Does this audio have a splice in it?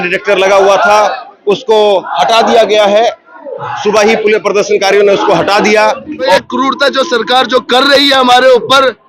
yes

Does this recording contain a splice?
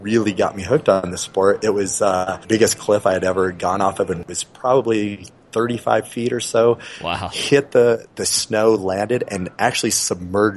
yes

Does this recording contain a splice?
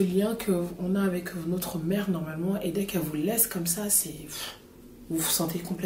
no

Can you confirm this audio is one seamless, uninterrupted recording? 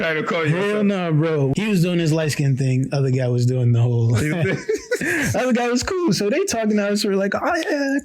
no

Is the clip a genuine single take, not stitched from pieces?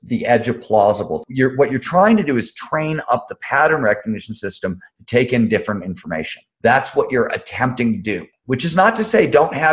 no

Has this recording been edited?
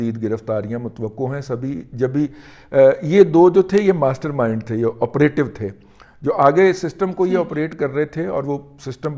no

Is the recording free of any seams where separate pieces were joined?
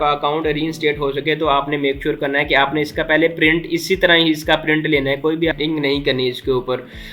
no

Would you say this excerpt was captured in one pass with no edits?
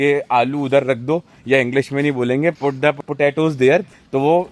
yes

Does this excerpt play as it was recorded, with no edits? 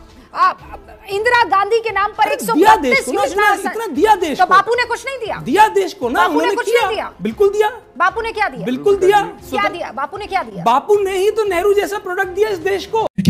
yes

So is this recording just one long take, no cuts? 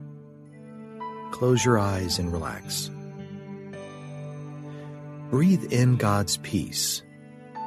no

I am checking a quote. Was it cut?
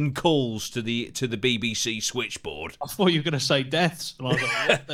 yes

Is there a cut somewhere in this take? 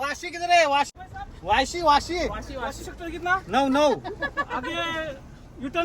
yes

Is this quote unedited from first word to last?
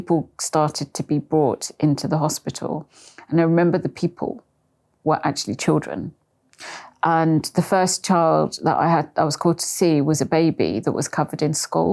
yes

